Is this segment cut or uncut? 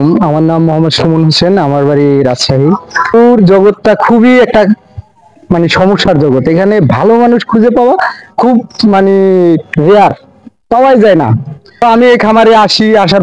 cut